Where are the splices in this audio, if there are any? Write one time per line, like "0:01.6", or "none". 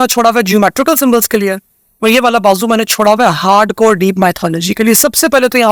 none

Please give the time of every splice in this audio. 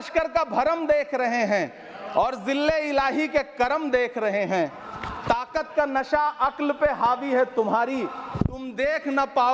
none

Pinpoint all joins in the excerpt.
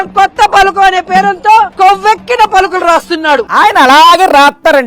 none

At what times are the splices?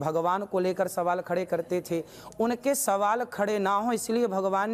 none

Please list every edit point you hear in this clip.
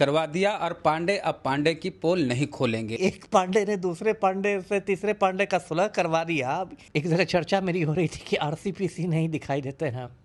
0:02.9
0:06.8

